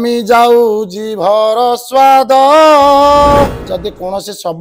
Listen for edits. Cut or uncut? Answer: cut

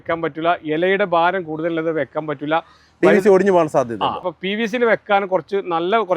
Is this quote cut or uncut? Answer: cut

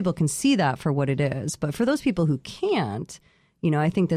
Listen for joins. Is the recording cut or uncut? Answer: uncut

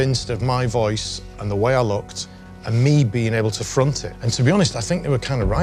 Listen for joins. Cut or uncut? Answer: uncut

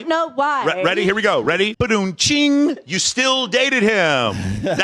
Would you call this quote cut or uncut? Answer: cut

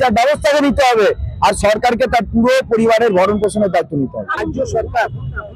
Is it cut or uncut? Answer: cut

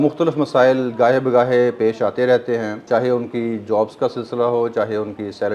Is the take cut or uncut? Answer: cut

